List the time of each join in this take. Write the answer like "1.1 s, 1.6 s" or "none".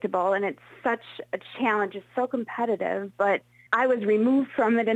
3.6 s